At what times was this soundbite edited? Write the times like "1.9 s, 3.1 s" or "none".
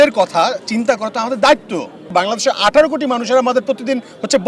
2.0 s